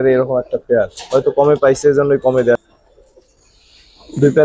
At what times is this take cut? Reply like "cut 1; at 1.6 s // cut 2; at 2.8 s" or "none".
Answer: cut 1; at 2.6 s

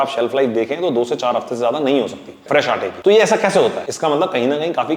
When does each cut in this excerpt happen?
cut 1; at 2.6 s // cut 2; at 3.9 s

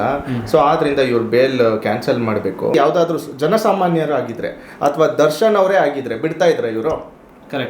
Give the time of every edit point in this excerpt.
cut 1; at 2.7 s

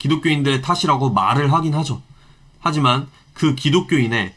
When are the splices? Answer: none

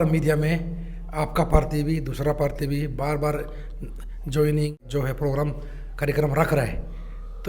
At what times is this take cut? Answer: cut 1; at 4.8 s

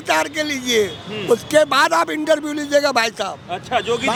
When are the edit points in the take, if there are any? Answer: none

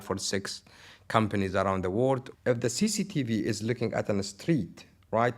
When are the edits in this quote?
cut 1; at 2.3 s

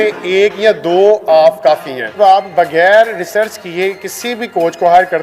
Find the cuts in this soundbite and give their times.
cut 1; at 2.2 s

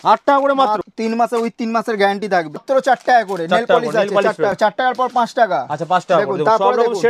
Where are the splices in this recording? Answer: cut 1; at 0.9 s // cut 2; at 2.6 s // cut 3; at 4.6 s

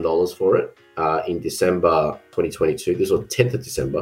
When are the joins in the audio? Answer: cut 1; at 2.3 s

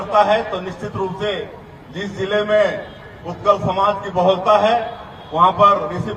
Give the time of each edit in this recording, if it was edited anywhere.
none

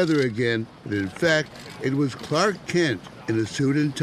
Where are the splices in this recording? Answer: cut 1; at 3.1 s

